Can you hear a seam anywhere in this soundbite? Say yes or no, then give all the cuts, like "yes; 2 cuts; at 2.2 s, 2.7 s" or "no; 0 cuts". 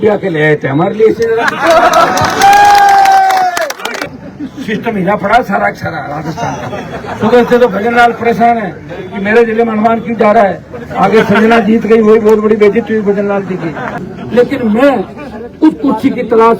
yes; 2 cuts; at 4.1 s, 14.0 s